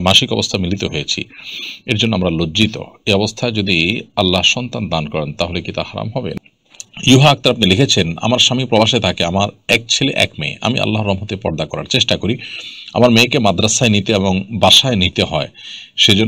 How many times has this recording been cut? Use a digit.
1